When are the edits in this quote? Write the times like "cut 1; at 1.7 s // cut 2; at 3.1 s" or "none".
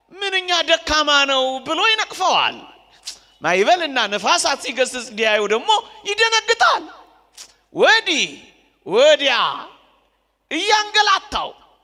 none